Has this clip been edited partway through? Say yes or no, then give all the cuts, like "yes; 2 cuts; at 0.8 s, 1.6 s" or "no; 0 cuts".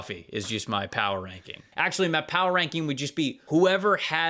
yes; 2 cuts; at 1.7 s, 3.4 s